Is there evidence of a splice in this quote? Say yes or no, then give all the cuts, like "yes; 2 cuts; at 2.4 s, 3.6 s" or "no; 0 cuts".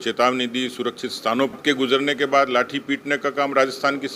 yes; 1 cut; at 1.5 s